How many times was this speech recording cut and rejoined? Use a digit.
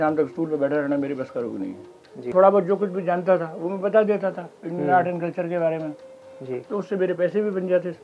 1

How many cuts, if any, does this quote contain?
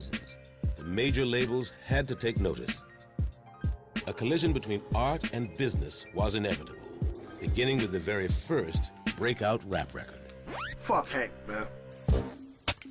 1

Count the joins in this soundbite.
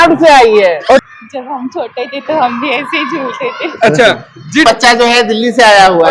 2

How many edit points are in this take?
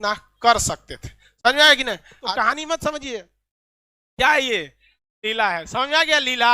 1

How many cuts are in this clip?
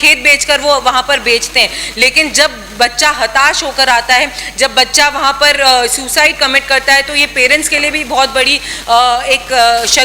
0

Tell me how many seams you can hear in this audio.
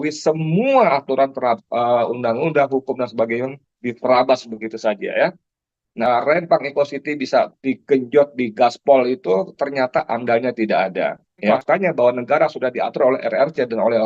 2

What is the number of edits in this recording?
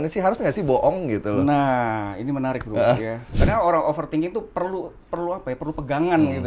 1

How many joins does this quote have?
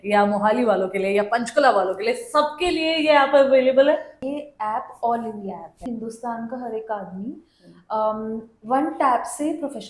2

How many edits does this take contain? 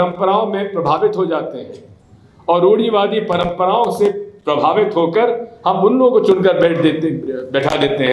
0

